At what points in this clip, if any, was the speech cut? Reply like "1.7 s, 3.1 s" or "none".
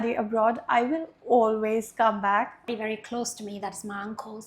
2.7 s